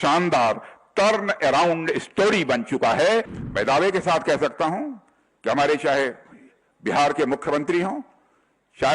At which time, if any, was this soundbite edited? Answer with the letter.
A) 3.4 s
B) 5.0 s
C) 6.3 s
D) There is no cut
A